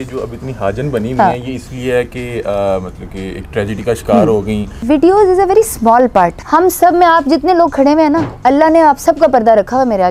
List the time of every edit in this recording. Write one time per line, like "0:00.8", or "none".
0:04.7
0:06.4
0:08.3